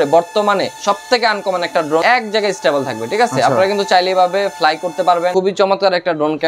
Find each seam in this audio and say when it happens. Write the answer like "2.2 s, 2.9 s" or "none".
2.0 s, 5.3 s